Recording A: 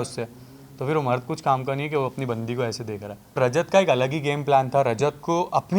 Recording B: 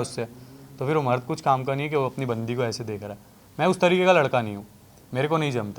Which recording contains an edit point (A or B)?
A